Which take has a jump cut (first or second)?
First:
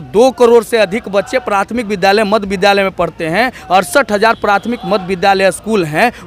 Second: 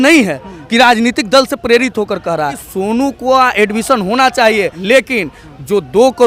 second